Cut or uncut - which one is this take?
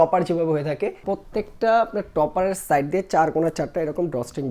cut